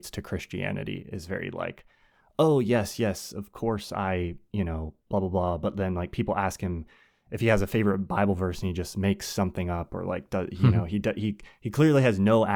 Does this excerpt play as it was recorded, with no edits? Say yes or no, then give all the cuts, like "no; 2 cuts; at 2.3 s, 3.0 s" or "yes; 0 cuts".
yes; 0 cuts